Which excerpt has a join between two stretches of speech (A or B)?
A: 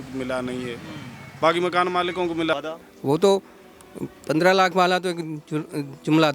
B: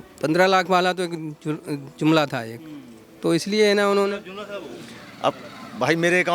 A